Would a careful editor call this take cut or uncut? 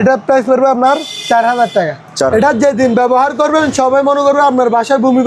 cut